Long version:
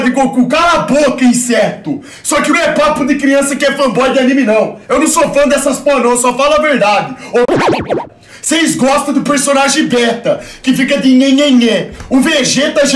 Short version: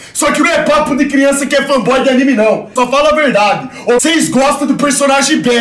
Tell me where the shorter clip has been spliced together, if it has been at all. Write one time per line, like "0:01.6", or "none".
0:02.7
0:04.0